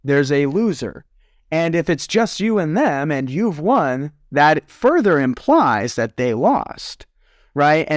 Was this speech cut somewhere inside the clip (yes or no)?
no